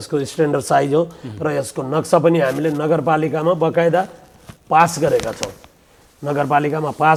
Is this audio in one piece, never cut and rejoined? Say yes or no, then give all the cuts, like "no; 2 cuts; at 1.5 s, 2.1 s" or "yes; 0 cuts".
yes; 0 cuts